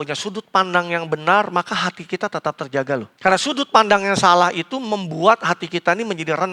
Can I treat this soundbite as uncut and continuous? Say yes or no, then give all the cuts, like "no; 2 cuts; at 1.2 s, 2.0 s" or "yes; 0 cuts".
no; 1 cut; at 3.1 s